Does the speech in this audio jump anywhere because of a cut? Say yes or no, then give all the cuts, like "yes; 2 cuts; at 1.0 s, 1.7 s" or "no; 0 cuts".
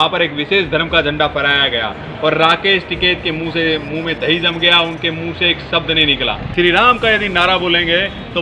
yes; 1 cut; at 6.4 s